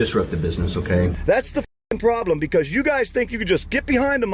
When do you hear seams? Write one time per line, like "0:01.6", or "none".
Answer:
0:01.2